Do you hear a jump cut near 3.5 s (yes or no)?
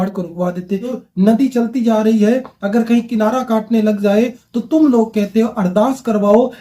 no